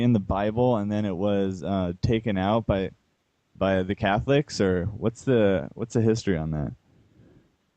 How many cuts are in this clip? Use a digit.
1